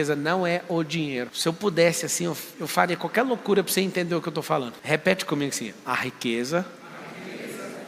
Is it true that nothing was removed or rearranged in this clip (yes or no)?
no